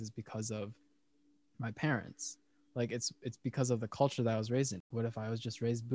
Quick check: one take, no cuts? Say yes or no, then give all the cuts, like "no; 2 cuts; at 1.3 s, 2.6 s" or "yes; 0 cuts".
no; 1 cut; at 4.9 s